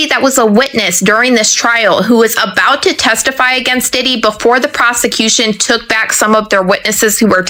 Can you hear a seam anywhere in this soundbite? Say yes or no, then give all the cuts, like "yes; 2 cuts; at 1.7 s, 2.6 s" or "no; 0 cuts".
no; 0 cuts